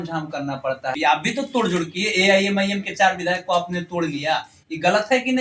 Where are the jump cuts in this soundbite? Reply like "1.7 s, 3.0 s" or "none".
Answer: 0.9 s